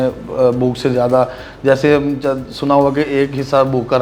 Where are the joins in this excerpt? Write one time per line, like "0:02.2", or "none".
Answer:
none